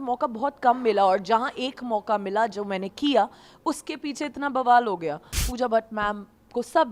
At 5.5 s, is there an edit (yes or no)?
yes